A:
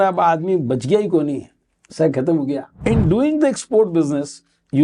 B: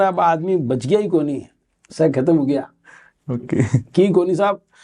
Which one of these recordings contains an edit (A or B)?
A